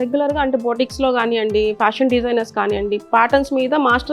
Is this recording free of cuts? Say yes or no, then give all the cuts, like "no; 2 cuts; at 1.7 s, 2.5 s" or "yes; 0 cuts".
yes; 0 cuts